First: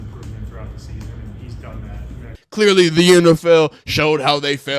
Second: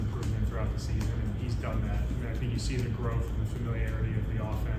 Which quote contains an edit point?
first; 1 cut; at 2.4 s

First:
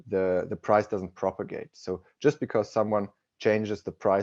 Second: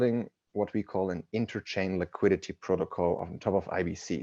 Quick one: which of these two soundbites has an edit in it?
second; 1 cut; at 3.2 s

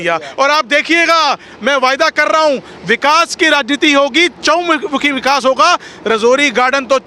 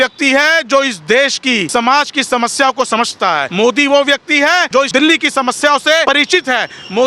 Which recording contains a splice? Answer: second; 4 cuts; at 1.7 s, 3.5 s, 4.9 s, 6.0 s

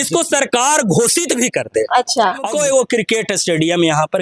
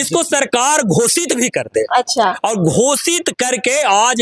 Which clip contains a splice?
first; 1 cut; at 2.5 s

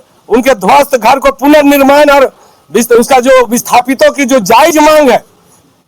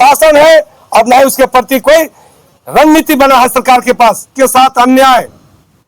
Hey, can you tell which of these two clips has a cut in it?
second; 1 cut; at 4.7 s

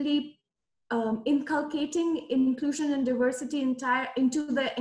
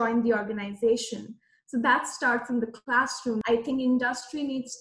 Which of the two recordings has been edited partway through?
second; 1 cut; at 3.4 s

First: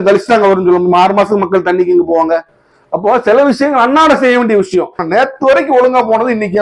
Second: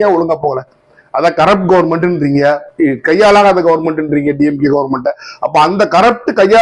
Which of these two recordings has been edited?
first; 1 cut; at 5.0 s

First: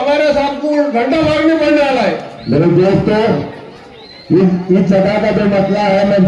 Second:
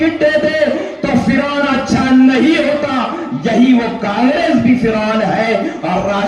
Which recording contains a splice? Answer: first; 1 cut; at 2.3 s

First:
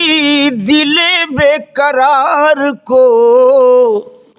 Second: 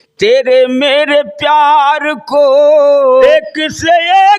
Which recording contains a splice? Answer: second; 1 cut; at 3.2 s

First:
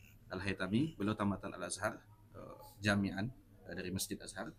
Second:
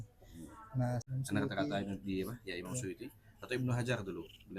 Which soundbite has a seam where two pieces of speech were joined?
second; 1 cut; at 1.0 s

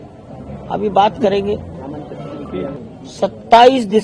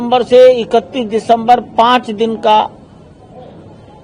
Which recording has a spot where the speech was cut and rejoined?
first; 1 cut; at 2.8 s

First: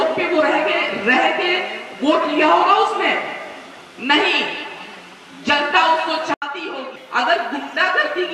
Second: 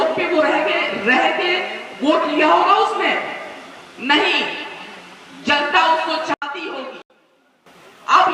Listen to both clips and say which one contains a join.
first; 1 cut; at 6.9 s

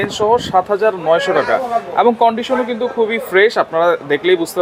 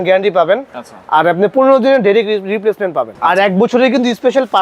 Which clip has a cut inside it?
second; 1 cut; at 3.1 s

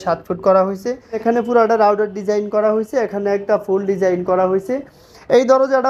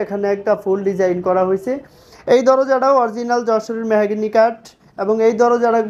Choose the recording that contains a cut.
first; 1 cut; at 1.2 s

